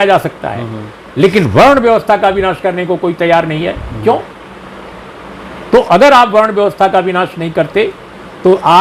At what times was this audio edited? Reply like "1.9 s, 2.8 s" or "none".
none

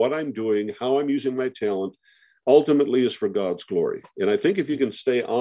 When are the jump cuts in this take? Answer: none

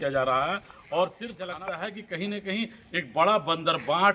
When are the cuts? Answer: 1.5 s

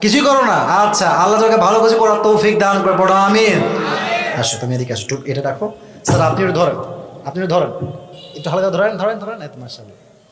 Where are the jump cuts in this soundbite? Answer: 4.3 s

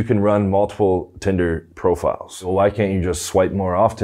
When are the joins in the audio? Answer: 2.5 s

